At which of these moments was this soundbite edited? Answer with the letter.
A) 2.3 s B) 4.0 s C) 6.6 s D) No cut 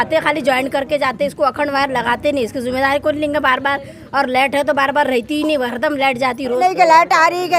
C